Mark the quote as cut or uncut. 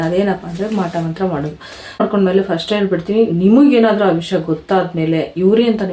cut